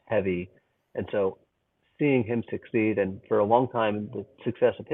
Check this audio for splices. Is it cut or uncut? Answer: uncut